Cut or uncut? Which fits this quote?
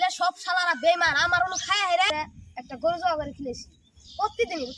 cut